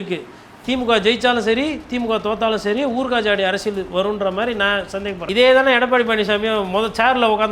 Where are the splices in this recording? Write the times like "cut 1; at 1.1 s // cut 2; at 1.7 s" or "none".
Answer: cut 1; at 5.2 s